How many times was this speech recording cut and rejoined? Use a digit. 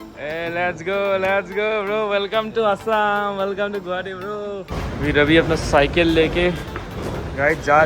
1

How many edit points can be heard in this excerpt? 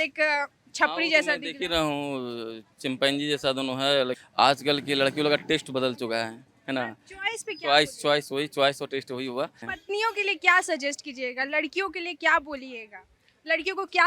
0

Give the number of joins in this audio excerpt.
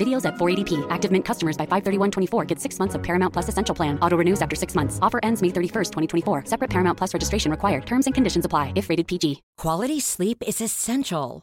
1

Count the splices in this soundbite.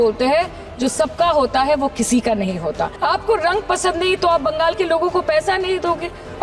1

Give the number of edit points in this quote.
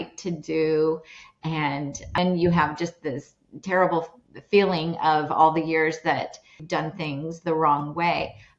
2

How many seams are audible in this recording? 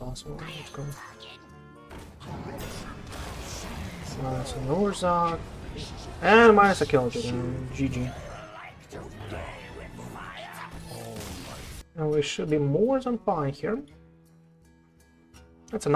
1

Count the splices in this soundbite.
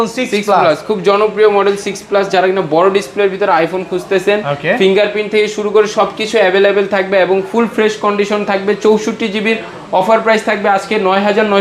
0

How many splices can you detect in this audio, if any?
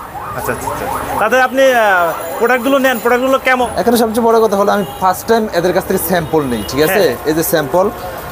1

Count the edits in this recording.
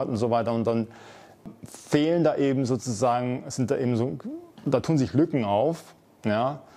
1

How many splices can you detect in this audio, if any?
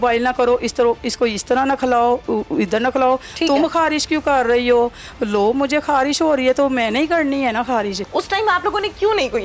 1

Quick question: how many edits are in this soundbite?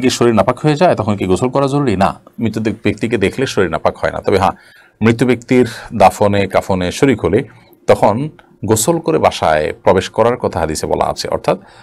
0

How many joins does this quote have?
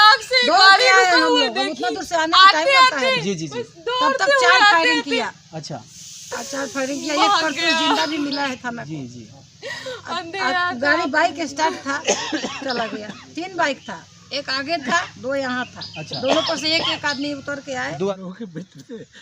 1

